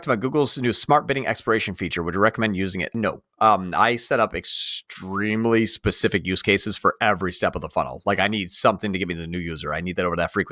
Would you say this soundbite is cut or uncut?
cut